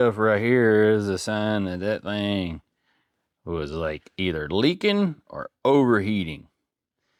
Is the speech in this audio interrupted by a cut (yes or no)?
no